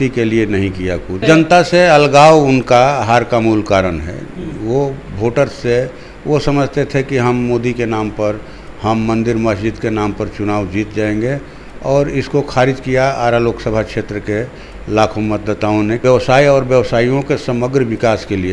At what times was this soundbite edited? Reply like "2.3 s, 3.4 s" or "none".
1.2 s, 16.0 s